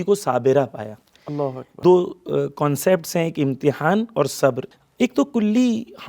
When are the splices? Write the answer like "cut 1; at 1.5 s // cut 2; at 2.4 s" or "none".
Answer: cut 1; at 1.7 s // cut 2; at 4.7 s